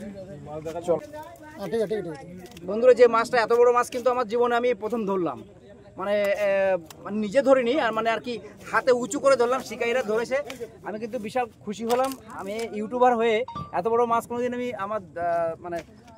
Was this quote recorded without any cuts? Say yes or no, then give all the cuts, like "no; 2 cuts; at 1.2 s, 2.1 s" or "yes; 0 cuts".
no; 1 cut; at 1.0 s